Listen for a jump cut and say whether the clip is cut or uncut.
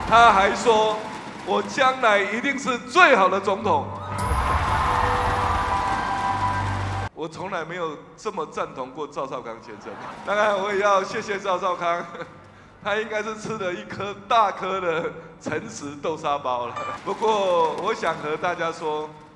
cut